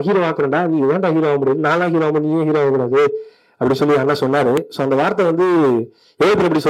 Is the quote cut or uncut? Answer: uncut